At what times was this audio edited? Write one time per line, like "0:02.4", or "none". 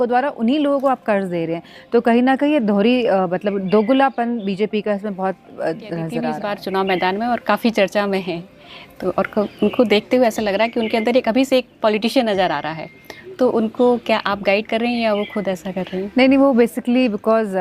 0:06.4